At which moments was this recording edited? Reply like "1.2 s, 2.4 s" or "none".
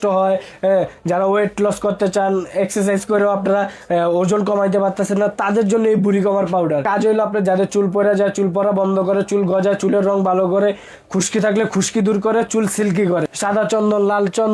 6.8 s, 13.3 s